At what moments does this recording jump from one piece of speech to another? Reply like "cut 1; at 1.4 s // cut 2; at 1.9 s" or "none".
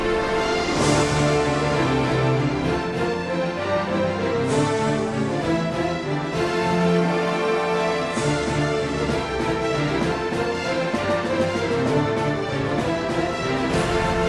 none